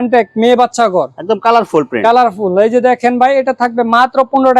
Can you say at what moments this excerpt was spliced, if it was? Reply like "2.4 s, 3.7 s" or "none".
none